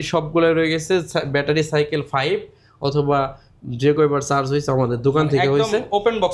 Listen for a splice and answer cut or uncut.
uncut